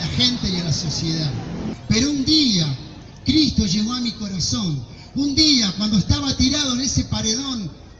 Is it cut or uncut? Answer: cut